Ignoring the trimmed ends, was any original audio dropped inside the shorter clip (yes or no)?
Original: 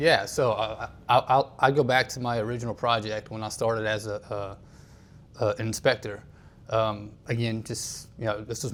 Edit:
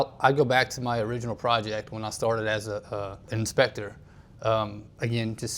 yes